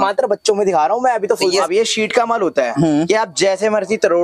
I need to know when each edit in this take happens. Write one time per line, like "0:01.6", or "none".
0:01.6